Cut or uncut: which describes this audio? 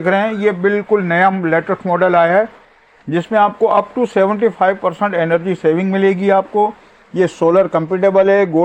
uncut